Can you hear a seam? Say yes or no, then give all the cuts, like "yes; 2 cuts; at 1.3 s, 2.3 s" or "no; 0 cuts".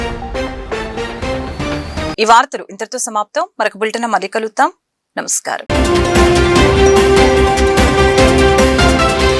no; 0 cuts